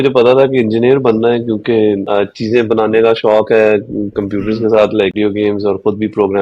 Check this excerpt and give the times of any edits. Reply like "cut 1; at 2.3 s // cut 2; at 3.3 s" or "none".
cut 1; at 5.1 s